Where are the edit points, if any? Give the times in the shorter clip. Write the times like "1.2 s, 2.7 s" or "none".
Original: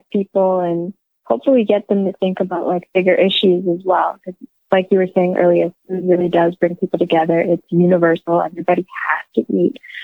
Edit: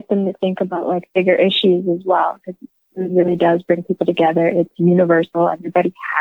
2.8 s